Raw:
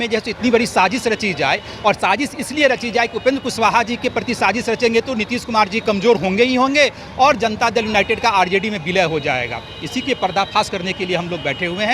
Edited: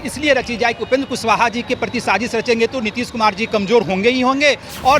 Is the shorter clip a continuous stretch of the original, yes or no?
yes